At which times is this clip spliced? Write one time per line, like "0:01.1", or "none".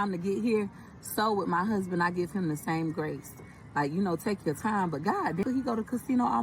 0:05.4

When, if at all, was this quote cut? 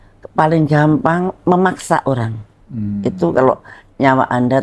none

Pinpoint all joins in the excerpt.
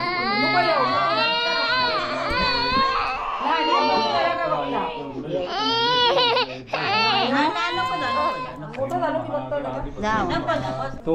none

